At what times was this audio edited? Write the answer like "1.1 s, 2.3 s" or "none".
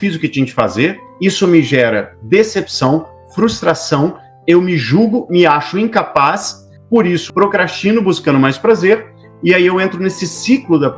1.1 s, 7.0 s